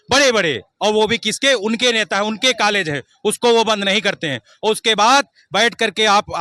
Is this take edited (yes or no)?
no